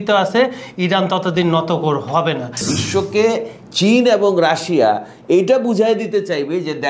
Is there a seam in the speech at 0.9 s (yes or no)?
no